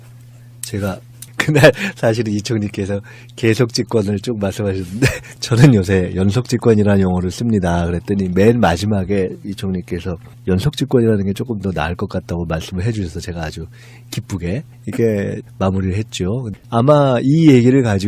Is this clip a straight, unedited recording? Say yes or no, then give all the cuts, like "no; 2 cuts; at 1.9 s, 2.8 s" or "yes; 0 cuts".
no; 1 cut; at 16.0 s